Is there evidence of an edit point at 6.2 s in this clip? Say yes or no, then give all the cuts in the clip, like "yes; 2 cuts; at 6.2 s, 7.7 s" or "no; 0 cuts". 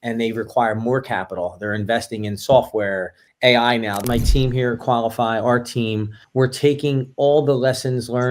no; 1 cut; at 4.0 s